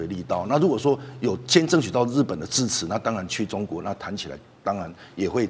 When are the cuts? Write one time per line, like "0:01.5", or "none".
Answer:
none